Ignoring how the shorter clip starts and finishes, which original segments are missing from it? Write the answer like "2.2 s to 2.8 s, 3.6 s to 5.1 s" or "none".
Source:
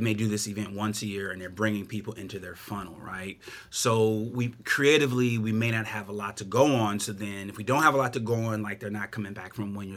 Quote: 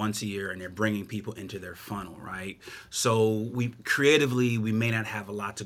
none